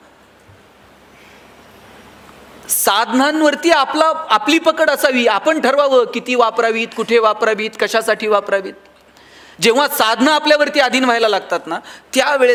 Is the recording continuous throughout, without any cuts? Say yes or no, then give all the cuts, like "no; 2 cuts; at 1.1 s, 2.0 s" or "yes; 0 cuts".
yes; 0 cuts